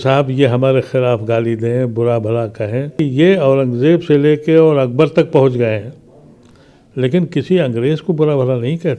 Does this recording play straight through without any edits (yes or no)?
no